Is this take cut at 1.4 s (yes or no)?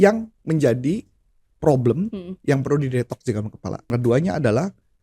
no